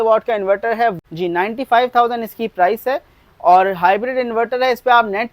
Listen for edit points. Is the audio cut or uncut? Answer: cut